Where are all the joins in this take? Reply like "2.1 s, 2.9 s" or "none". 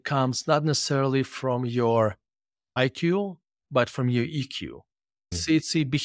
2.8 s